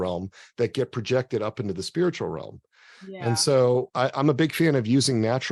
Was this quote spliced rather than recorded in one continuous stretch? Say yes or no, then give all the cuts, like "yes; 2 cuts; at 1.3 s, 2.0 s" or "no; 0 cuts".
yes; 1 cut; at 3.9 s